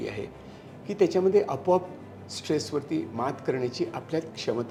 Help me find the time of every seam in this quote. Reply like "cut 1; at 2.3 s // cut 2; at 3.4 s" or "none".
none